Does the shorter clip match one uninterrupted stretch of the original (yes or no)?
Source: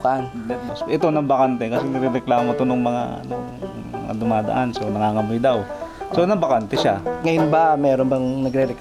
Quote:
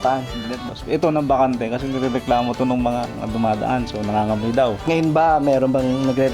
no